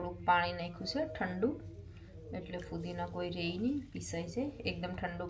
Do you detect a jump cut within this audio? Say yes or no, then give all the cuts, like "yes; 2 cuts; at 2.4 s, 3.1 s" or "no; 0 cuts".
no; 0 cuts